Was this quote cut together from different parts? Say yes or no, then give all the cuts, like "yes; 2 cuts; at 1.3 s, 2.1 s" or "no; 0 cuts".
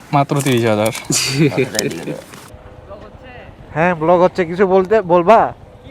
yes; 1 cut; at 2.5 s